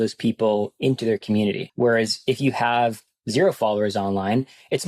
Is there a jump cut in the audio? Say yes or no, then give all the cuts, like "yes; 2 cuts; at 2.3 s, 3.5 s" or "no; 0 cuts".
yes; 1 cut; at 1.7 s